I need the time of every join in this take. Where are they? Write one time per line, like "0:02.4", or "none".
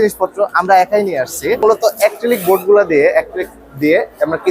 0:01.6